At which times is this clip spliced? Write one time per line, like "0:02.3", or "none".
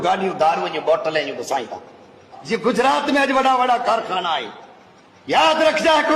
0:02.3